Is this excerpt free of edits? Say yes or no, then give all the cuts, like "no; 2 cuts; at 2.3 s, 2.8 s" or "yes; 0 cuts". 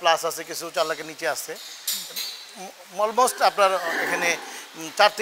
yes; 0 cuts